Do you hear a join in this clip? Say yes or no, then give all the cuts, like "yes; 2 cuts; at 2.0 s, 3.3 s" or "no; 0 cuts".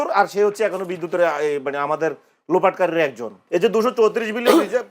yes; 1 cut; at 3.3 s